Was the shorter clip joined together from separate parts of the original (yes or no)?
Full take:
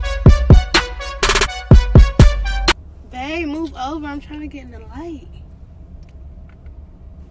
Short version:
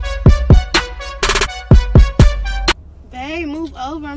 no